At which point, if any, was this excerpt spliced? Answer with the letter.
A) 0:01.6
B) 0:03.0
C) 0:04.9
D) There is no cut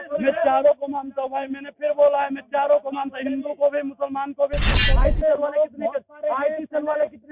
C